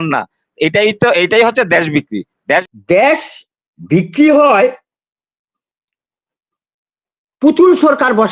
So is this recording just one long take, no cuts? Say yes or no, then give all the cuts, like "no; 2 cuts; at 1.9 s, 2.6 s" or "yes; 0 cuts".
no; 1 cut; at 2.6 s